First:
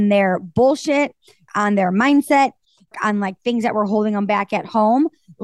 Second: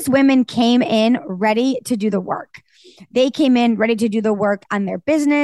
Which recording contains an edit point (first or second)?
first